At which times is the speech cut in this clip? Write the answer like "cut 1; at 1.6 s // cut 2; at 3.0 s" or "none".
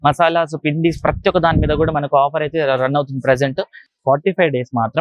cut 1; at 3.9 s